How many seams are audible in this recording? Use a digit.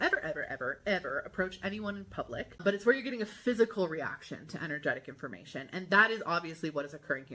1